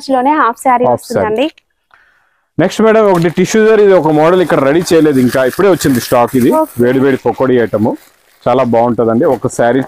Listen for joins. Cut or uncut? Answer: uncut